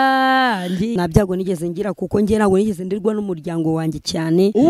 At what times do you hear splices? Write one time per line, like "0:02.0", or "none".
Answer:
0:01.0

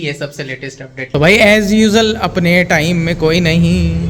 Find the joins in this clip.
0:01.1

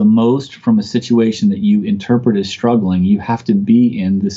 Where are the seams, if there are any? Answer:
none

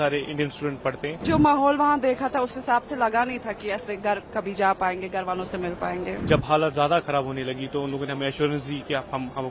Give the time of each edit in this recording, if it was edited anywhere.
0:01.2
0:06.2

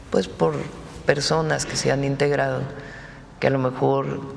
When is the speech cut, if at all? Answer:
none

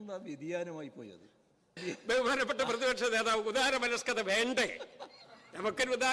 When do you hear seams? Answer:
0:01.8

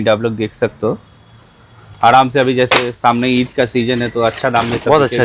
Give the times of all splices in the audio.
none

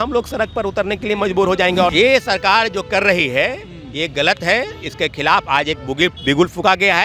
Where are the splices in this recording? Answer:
0:01.9

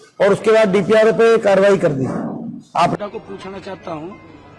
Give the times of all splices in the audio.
0:02.9

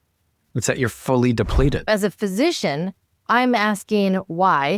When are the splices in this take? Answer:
0:01.9

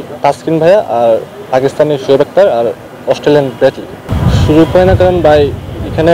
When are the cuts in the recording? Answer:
0:04.0

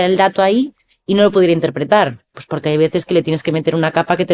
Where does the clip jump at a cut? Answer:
none

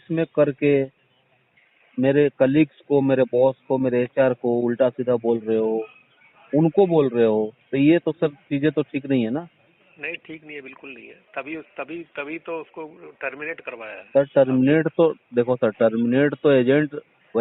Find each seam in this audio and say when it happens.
none

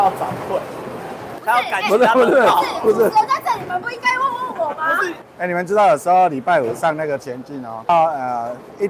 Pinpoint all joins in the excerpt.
0:05.2
0:07.9

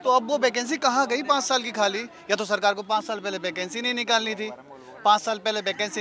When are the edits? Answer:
none

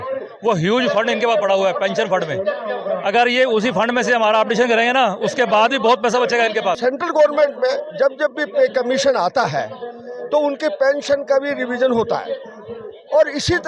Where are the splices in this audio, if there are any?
0:06.8

